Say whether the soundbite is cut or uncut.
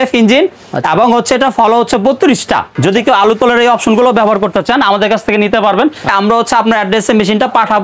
cut